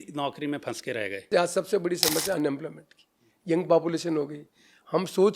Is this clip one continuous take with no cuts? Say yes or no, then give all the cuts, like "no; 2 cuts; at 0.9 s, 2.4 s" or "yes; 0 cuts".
no; 1 cut; at 1.2 s